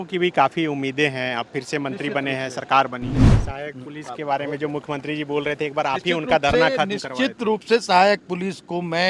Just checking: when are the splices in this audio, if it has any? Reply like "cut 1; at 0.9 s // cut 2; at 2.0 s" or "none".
cut 1; at 3.3 s